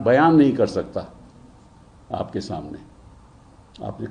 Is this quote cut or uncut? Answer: uncut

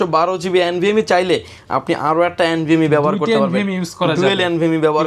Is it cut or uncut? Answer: uncut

